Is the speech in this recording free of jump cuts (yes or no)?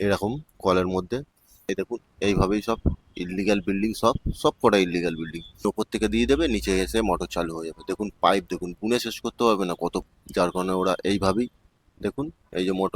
no